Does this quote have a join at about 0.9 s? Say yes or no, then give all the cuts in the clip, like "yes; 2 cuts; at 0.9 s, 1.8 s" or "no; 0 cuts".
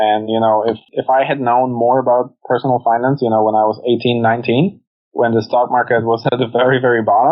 yes; 1 cut; at 0.9 s